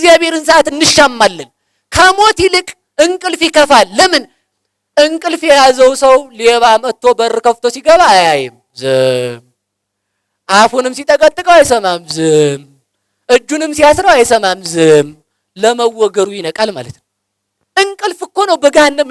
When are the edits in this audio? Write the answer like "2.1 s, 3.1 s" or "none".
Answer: none